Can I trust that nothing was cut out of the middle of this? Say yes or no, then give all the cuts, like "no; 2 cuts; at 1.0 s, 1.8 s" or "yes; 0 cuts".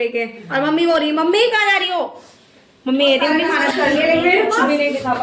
no; 1 cut; at 3.6 s